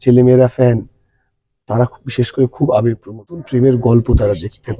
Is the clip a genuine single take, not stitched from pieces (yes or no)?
no